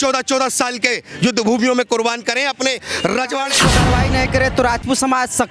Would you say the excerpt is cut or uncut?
cut